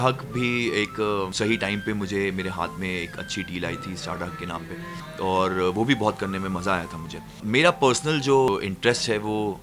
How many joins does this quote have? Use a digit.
2